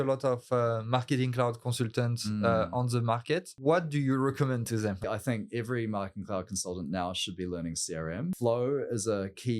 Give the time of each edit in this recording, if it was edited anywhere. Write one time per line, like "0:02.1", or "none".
0:03.5
0:05.0
0:08.3